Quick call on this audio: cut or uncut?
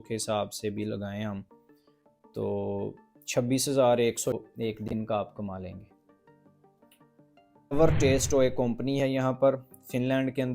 cut